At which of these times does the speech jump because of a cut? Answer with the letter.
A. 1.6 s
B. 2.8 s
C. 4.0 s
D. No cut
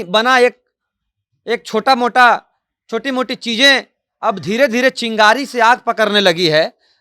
D